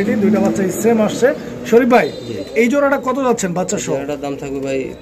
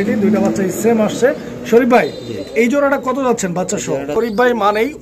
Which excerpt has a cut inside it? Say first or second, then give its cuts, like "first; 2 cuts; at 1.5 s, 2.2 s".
second; 1 cut; at 4.1 s